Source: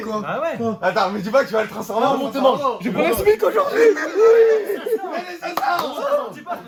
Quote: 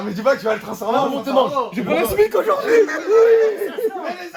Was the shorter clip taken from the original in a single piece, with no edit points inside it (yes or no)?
yes